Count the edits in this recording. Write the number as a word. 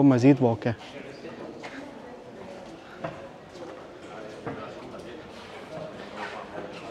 zero